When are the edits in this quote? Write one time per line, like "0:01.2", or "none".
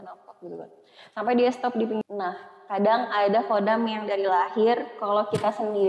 0:02.0

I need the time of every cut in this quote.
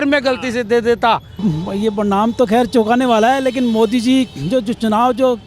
0:01.4

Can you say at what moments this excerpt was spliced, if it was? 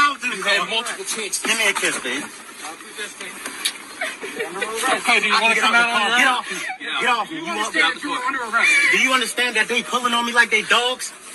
0:05.8

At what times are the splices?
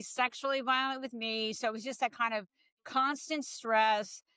none

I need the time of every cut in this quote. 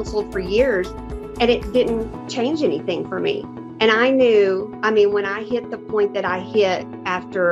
none

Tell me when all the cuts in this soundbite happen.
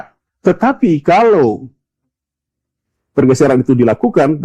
none

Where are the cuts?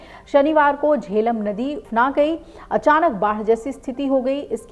0:01.8

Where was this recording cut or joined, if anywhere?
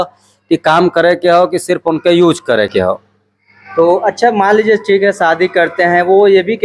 none

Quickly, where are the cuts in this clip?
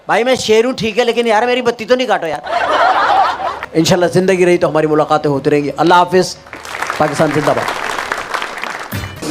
none

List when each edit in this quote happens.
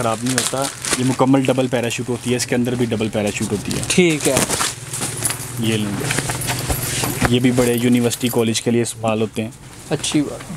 none

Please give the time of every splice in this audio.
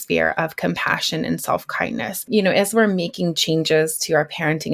0:02.2

